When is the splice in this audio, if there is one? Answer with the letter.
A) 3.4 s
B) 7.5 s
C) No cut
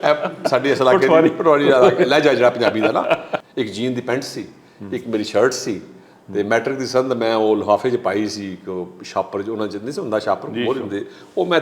A